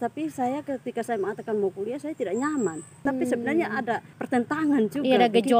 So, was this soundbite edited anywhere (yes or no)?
yes